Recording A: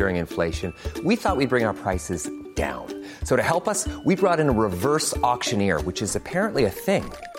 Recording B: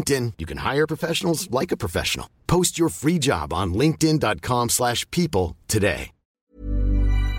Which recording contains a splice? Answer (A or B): B